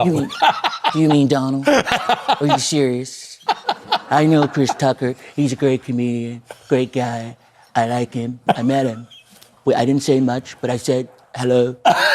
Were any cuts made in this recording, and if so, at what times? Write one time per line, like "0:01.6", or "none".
0:03.7
0:08.3